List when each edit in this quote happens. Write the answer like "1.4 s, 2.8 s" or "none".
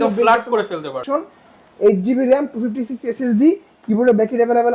1.0 s